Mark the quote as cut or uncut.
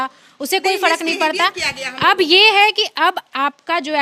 uncut